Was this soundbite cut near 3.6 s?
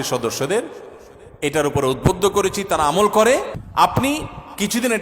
yes; 1 cut; at 3.6 s

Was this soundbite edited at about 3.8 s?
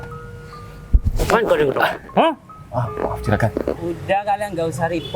yes; 1 cut; at 3.8 s

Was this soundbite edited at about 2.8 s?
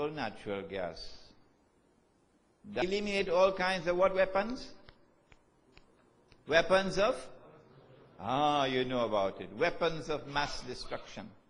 no; 0 cuts

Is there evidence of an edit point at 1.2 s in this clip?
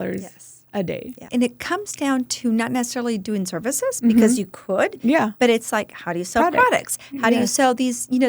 yes; 1 cut; at 1.2 s

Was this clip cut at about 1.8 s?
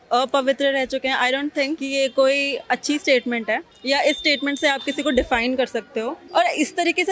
yes; 3 cuts; at 1.8 s, 3.7 s, 6.2 s

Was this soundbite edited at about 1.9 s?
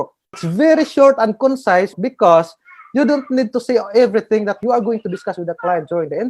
yes; 1 cut; at 1.9 s

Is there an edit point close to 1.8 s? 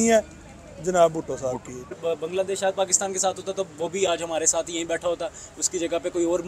yes; 1 cut; at 1.8 s

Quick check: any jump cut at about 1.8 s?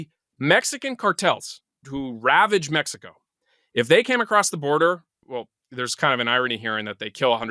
yes; 2 cuts; at 1.8 s, 5.2 s

